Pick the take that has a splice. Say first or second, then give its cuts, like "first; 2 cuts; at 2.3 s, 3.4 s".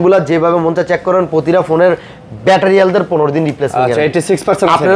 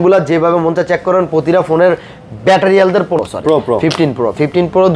second; 1 cut; at 3.2 s